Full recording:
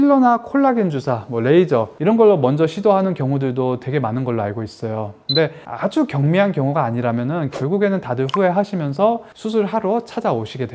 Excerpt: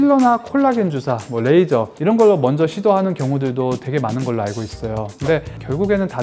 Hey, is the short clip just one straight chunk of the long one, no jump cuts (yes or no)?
no